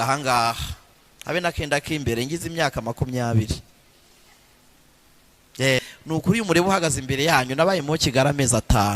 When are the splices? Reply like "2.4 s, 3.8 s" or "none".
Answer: 5.8 s